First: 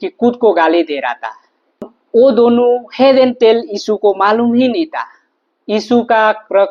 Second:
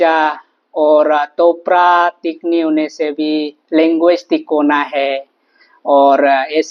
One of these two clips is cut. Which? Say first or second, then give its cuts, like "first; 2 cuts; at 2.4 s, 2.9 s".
first; 1 cut; at 1.9 s